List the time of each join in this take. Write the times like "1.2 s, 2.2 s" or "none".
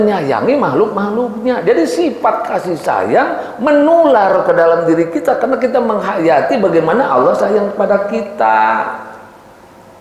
none

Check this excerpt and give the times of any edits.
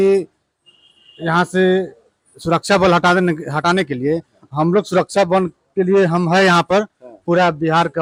none

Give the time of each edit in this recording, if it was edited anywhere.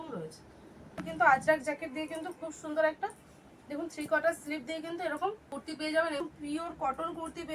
0.9 s, 5.4 s, 6.2 s

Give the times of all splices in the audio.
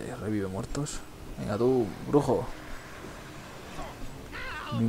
3.7 s

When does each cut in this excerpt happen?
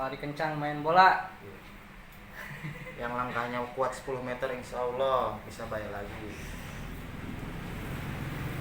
none

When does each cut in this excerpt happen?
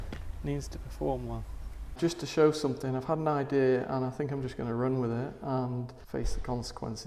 1.9 s, 6.0 s

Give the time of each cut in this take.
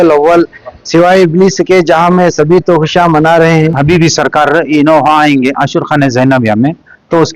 3.8 s

